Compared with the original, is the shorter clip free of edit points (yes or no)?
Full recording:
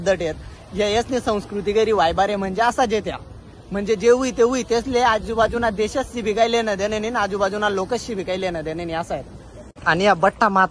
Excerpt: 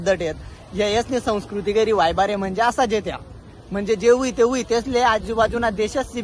yes